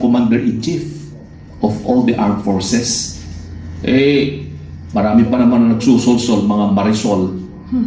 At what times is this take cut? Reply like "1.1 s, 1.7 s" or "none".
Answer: none